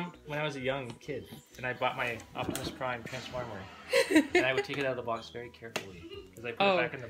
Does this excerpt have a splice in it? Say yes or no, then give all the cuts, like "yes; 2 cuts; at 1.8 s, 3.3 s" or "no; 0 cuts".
no; 0 cuts